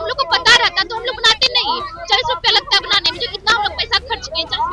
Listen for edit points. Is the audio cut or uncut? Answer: uncut